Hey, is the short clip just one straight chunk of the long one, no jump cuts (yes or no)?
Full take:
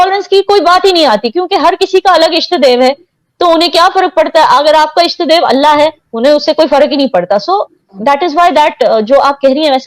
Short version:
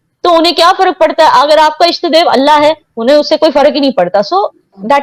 yes